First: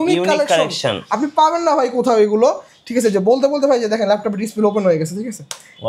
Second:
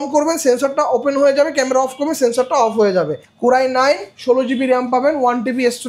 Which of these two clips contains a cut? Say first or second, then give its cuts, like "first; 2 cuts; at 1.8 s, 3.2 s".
second; 1 cut; at 3.2 s